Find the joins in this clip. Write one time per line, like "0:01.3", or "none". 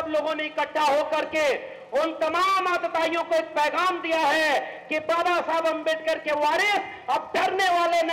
none